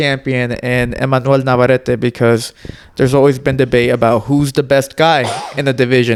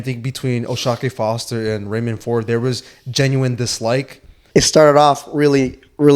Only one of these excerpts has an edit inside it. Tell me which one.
second; 1 cut; at 4.4 s

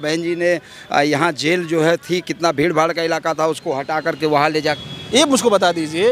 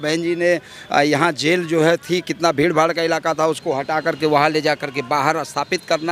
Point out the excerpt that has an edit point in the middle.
first; 1 cut; at 4.9 s

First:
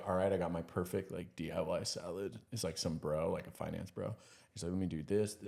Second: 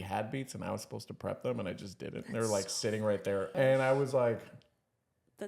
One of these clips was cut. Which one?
second; 1 cut; at 3.5 s

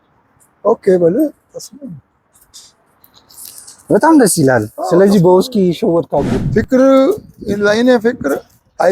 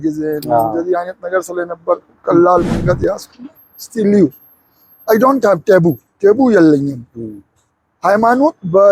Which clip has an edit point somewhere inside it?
first; 1 cut; at 6.3 s

